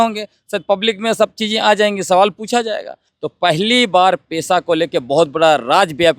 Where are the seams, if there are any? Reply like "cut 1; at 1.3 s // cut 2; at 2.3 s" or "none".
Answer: cut 1; at 3.1 s